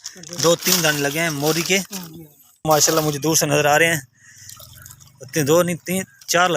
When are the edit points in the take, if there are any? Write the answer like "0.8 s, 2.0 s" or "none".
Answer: 2.7 s